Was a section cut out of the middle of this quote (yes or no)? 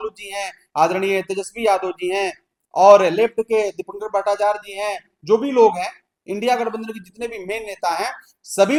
no